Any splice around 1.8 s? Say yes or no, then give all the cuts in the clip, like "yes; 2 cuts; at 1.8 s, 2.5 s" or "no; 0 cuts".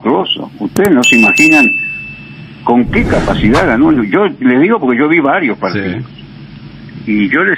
no; 0 cuts